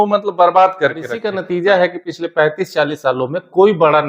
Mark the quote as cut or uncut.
cut